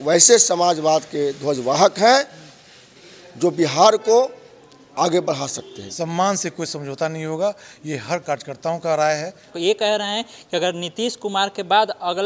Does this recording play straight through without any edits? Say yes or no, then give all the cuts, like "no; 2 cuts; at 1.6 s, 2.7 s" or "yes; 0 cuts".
no; 2 cuts; at 5.8 s, 9.5 s